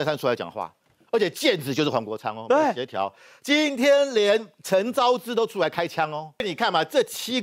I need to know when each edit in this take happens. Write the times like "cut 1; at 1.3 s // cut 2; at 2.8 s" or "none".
cut 1; at 6.5 s